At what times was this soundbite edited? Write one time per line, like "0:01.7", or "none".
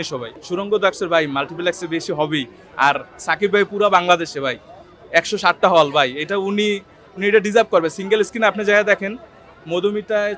none